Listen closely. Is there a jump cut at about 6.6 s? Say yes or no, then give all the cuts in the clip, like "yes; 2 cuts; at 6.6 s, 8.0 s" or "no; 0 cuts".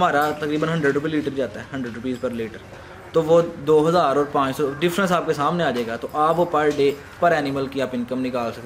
no; 0 cuts